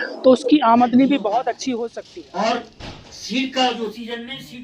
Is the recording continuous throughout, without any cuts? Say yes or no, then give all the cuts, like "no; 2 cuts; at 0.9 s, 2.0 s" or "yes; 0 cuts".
no; 1 cut; at 1.7 s